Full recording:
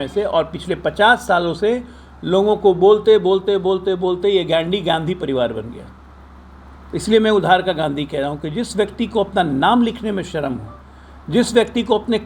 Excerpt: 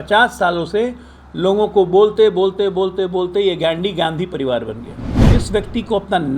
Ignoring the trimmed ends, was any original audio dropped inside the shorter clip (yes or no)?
yes